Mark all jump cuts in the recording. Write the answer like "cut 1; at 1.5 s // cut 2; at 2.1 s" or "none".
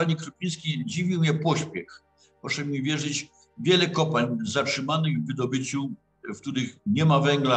none